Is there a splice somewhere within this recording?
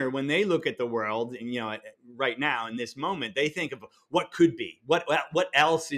no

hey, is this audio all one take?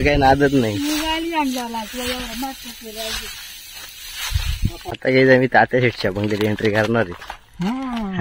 yes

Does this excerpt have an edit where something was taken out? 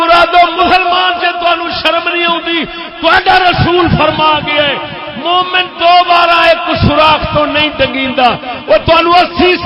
no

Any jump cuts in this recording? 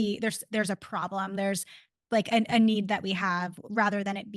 no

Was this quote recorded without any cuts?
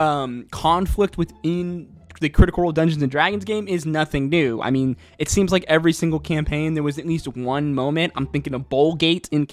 yes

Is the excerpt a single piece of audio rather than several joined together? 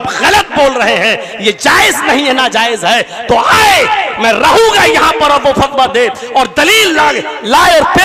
yes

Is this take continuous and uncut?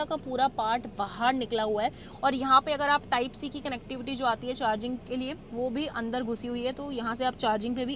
yes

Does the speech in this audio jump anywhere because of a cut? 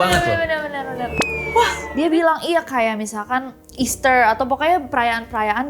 yes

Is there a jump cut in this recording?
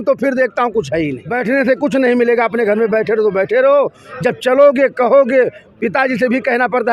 yes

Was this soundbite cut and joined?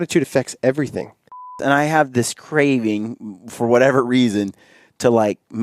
yes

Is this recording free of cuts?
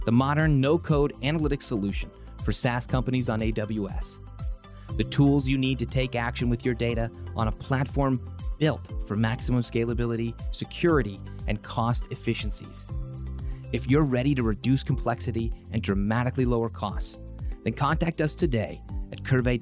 yes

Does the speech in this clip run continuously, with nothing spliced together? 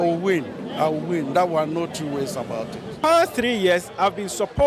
no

